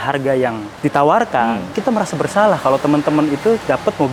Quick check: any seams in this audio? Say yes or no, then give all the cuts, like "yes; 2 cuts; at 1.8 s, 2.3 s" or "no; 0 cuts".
no; 0 cuts